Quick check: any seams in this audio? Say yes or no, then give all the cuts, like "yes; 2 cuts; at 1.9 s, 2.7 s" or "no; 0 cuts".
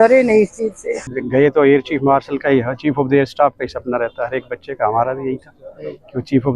yes; 1 cut; at 1.1 s